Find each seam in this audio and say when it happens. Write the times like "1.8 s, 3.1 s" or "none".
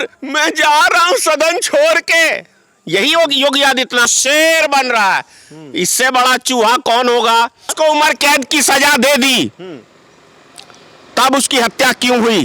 4.1 s, 7.7 s